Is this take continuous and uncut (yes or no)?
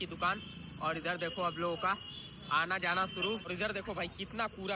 no